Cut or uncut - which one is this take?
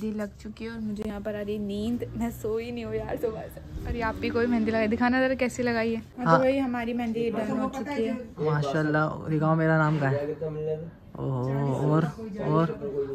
uncut